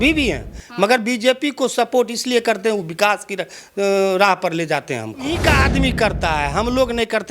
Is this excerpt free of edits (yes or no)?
no